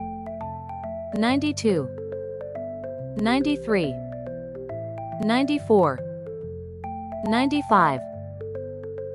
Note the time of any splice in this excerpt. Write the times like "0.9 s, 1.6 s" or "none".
2.0 s, 3.1 s, 3.9 s, 5.2 s